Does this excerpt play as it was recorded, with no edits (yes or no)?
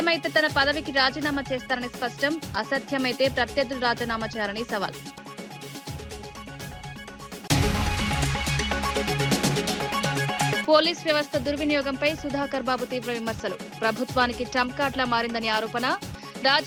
yes